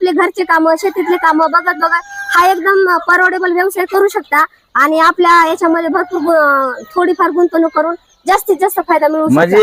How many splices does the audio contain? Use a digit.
0